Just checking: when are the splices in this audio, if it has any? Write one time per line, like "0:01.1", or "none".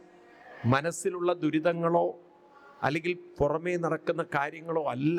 none

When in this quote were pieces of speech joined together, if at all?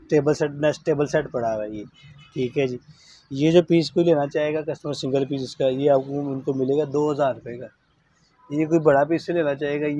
none

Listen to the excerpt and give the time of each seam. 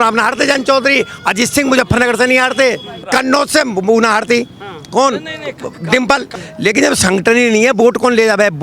0:03.1
0:06.3

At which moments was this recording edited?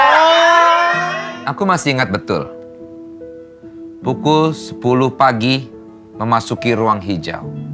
0:01.0

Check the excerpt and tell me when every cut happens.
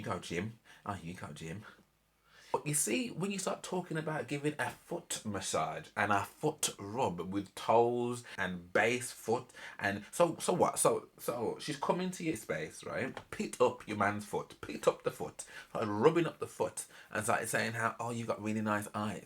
0:02.5
0:08.3
0:12.7

